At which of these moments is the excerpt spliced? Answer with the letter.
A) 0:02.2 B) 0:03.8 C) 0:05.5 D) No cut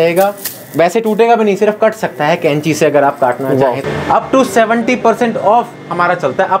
B